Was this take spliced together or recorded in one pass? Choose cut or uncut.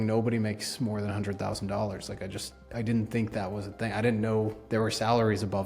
uncut